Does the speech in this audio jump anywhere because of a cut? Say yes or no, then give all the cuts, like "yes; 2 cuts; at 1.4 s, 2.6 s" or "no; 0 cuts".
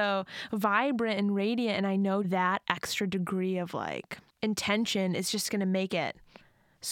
yes; 1 cut; at 2.3 s